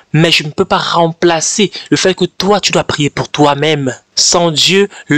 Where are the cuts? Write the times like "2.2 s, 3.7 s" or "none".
4.0 s